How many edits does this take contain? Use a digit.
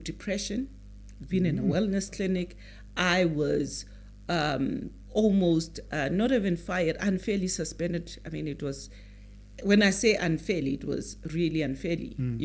0